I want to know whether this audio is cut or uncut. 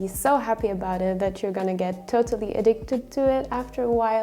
uncut